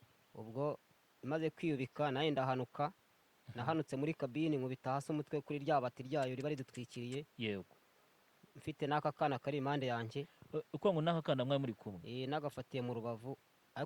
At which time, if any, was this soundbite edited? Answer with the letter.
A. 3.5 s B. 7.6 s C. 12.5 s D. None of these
D